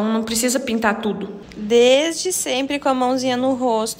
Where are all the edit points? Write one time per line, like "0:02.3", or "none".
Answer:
0:01.4